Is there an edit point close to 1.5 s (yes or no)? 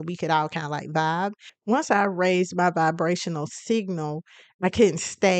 no